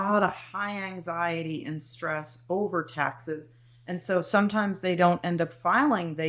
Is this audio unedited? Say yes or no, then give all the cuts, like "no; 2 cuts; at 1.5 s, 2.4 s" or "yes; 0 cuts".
yes; 0 cuts